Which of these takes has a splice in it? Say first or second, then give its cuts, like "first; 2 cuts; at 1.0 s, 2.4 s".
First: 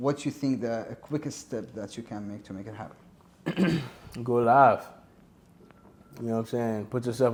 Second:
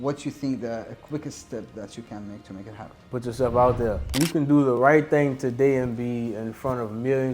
second; 2 cuts; at 3.1 s, 4.1 s